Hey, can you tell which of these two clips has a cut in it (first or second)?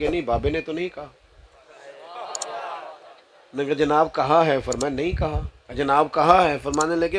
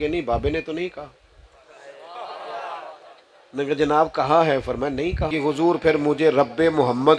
second